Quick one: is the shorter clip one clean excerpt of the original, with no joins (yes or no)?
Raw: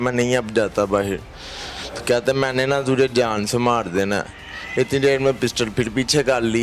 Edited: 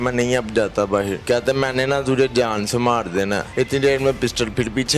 no